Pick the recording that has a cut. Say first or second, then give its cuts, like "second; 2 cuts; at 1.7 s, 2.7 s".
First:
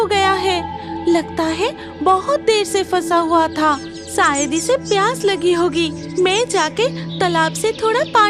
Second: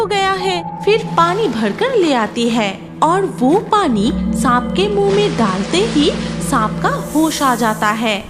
second; 2 cuts; at 1.0 s, 2.8 s